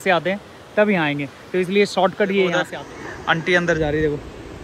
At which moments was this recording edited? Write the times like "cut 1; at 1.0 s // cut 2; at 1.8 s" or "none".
cut 1; at 2.7 s

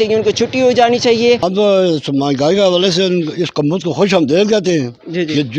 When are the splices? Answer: cut 1; at 1.5 s

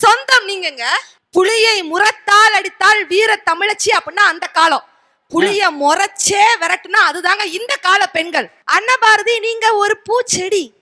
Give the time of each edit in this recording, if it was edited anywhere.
cut 1; at 1.1 s // cut 2; at 8.6 s

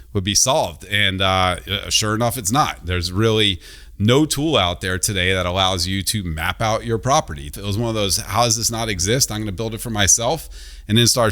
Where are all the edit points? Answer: cut 1; at 7.6 s

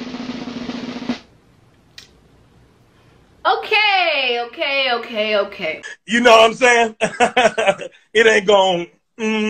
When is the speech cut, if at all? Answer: cut 1; at 3.5 s

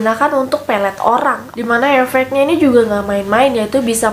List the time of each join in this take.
cut 1; at 1.5 s

